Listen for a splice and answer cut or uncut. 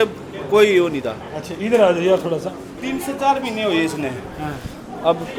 uncut